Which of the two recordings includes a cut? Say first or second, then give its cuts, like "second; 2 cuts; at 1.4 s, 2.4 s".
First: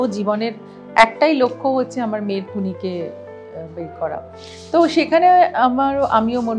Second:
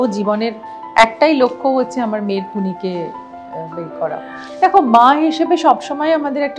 second; 1 cut; at 4.4 s